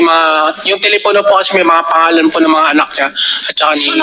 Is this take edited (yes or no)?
no